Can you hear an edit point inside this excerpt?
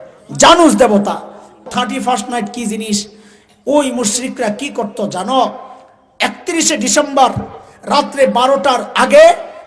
yes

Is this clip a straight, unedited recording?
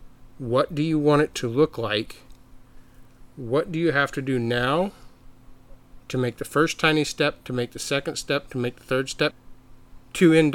no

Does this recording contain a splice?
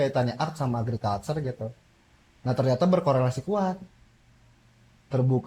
no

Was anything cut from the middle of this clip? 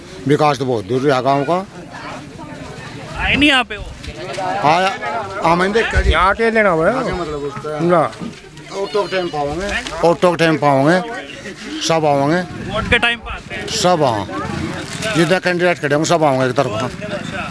no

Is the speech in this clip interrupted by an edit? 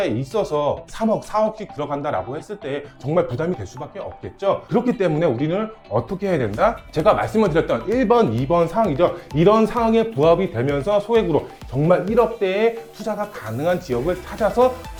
no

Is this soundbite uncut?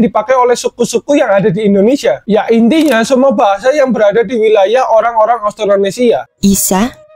no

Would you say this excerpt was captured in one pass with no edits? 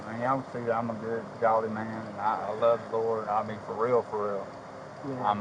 yes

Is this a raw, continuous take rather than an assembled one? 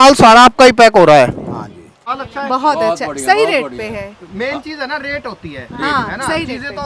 no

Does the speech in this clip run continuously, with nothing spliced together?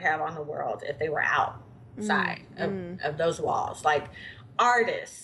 yes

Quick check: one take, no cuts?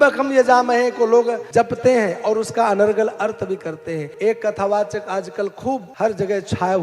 no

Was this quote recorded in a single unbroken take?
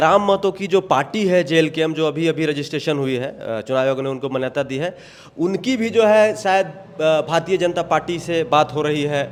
yes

